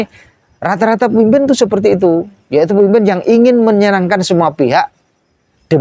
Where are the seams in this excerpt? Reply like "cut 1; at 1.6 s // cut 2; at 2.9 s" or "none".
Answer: none